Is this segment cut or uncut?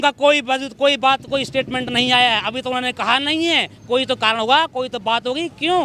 uncut